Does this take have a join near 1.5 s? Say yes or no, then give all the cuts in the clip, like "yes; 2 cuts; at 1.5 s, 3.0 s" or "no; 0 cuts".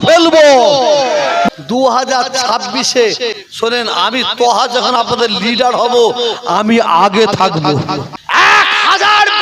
yes; 3 cuts; at 1.5 s, 3.4 s, 8.2 s